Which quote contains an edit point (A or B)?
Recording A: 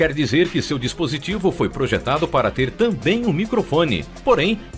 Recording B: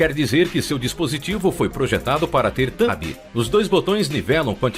A